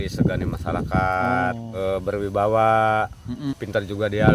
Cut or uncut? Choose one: cut